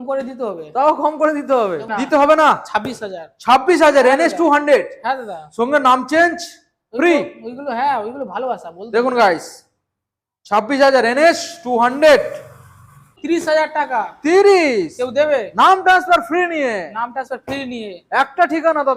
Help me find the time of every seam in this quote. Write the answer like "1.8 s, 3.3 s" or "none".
1.9 s, 13.1 s